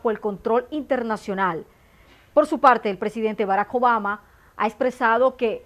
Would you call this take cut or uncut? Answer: uncut